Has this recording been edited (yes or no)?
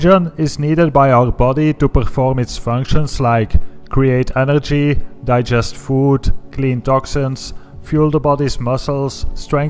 no